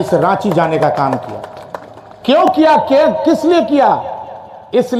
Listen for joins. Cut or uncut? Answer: uncut